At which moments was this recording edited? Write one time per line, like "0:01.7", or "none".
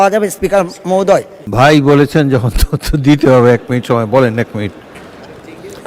0:01.4